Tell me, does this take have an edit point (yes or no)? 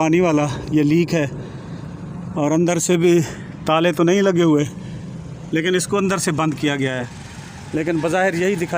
yes